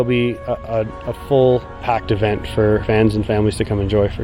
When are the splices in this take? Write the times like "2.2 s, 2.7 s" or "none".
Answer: 1.8 s, 2.8 s